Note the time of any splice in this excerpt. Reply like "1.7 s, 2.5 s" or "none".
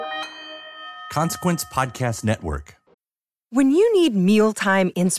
2.7 s